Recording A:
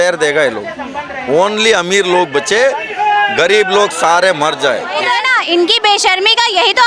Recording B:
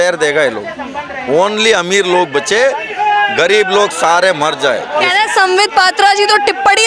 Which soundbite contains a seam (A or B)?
A